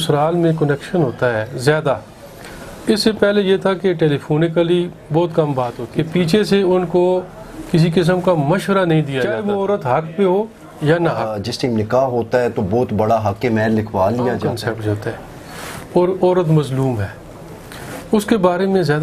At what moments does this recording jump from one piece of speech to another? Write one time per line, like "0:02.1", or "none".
0:05.8
0:09.4
0:11.4
0:14.5